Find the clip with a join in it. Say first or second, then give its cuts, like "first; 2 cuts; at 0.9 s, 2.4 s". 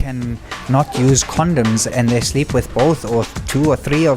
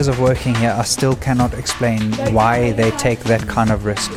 first; 1 cut; at 1.9 s